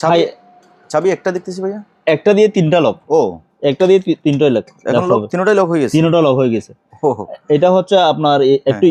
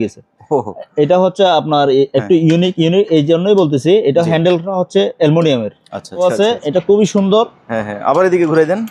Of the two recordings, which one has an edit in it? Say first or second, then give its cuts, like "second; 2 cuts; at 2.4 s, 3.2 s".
second; 1 cut; at 6.2 s